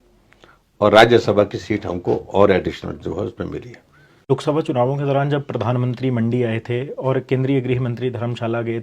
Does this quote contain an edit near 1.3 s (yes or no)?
no